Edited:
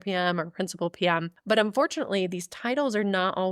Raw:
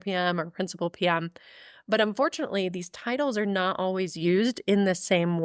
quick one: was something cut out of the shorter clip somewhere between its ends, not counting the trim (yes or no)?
yes